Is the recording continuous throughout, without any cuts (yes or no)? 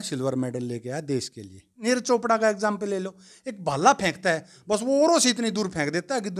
no